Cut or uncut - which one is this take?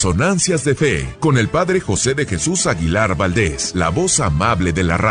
cut